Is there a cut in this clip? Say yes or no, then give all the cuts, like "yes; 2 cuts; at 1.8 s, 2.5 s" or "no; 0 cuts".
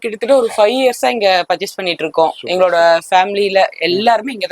no; 0 cuts